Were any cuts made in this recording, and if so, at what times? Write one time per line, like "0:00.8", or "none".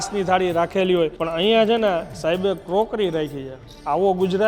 0:01.2

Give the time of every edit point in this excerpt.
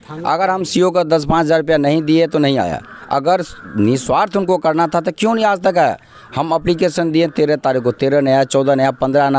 none

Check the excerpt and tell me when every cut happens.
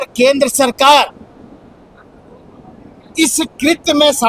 none

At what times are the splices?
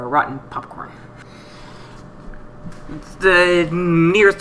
0:01.2

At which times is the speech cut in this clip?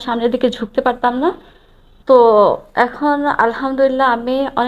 0:01.9

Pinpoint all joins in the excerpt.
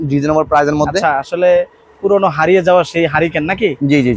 none

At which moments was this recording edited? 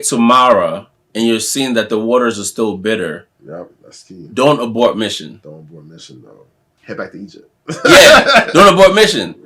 0:06.7

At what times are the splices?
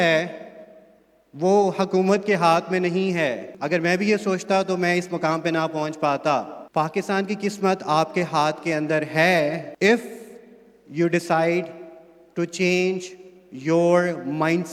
0:03.5
0:06.6
0:09.7

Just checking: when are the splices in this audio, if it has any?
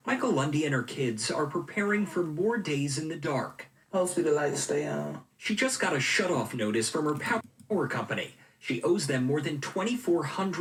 none

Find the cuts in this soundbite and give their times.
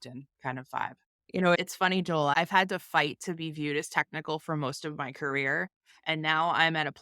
0:01.1

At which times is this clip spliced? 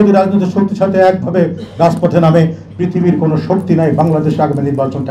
none

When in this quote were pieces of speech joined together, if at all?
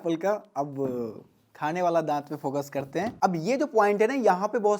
0:03.1

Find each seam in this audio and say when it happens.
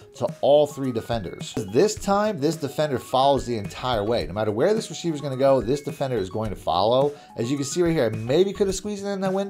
0:01.7

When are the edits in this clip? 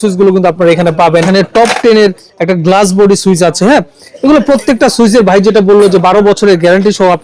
0:01.3

